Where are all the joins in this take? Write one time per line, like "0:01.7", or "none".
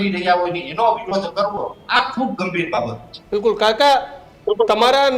none